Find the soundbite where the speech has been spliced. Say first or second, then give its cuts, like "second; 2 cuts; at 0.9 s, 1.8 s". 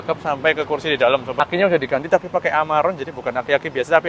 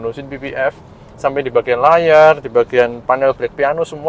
first; 1 cut; at 1.3 s